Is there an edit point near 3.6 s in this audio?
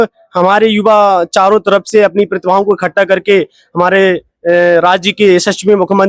no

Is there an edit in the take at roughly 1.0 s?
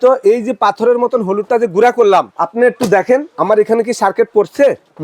no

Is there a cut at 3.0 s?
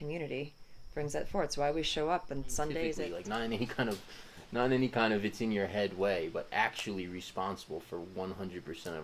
yes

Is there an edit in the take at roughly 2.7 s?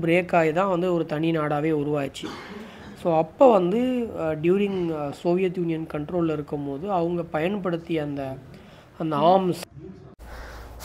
no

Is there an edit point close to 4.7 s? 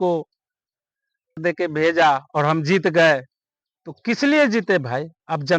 no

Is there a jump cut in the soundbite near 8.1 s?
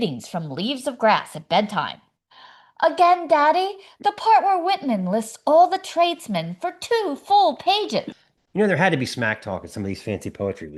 yes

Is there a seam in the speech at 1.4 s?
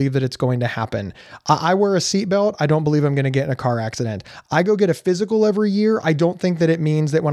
no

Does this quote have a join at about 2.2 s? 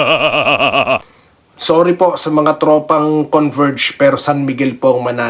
no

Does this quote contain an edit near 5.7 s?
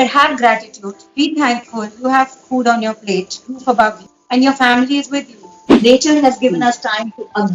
yes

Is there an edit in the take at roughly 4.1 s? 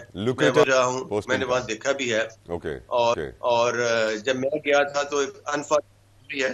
no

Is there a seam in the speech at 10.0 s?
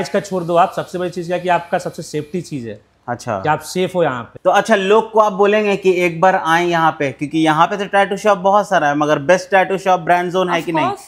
no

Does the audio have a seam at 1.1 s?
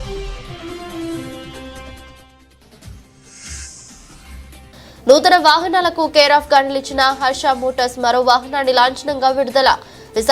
yes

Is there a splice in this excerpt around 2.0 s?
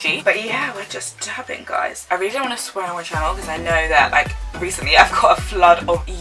yes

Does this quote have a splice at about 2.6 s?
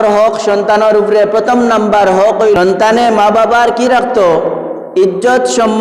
yes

